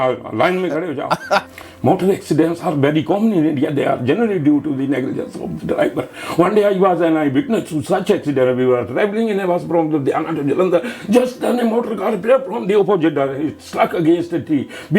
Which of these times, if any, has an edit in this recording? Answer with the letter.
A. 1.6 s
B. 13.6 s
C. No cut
A